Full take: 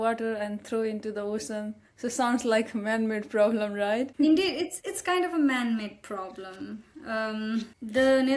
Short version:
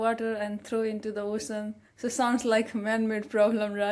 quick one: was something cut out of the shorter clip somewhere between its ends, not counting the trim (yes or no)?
no